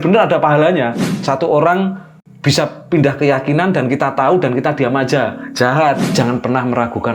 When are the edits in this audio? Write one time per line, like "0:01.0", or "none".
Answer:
0:01.0
0:06.0